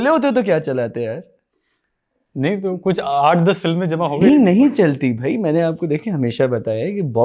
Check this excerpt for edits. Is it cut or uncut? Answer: uncut